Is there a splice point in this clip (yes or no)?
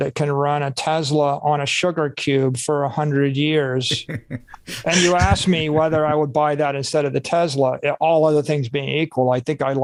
no